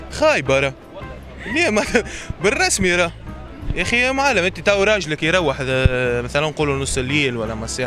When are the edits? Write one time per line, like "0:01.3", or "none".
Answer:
none